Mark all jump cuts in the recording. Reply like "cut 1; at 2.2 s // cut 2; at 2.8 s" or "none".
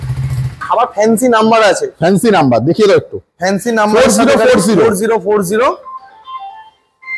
none